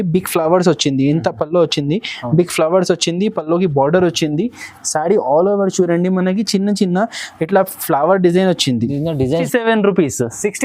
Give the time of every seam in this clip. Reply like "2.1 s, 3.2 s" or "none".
9.5 s